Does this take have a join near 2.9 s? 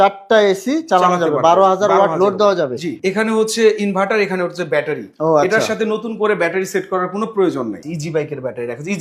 yes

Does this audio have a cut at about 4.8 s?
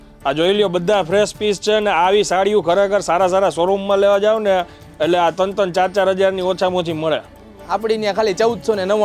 no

